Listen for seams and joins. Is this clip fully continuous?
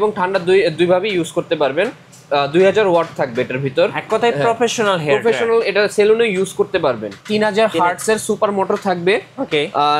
no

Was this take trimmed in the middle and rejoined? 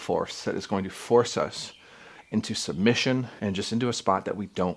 yes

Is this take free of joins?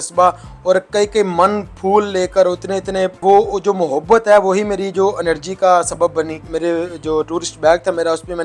no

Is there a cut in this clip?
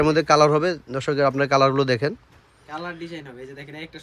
no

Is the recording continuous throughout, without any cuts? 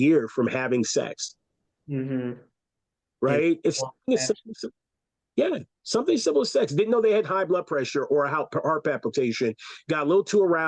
yes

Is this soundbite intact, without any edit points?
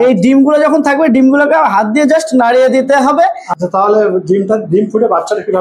no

